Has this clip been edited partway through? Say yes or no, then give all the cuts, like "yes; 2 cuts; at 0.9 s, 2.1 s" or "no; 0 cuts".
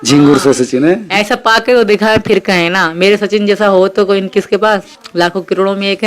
yes; 1 cut; at 5.0 s